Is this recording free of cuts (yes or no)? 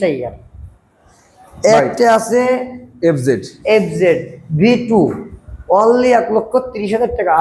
yes